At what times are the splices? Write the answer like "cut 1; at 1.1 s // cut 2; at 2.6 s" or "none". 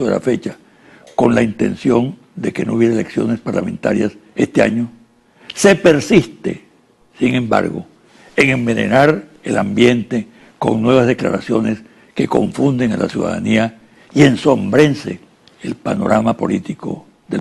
cut 1; at 11.9 s